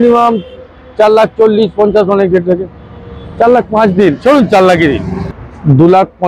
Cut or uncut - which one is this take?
cut